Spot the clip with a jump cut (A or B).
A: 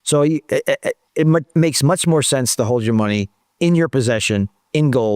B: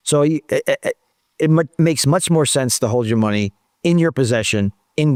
A